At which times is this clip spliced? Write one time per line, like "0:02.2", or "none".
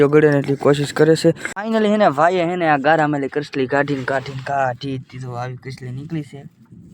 0:01.5